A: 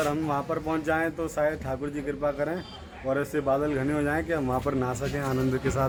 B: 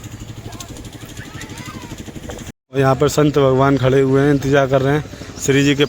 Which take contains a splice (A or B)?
B